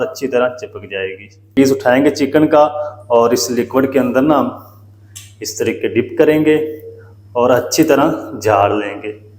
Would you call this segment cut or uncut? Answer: cut